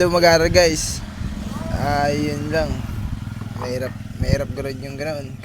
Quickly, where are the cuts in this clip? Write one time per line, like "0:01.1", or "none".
none